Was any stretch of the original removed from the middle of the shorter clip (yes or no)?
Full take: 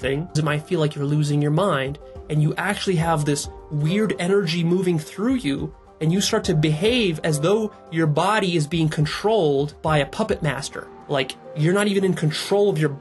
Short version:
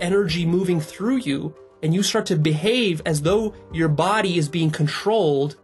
no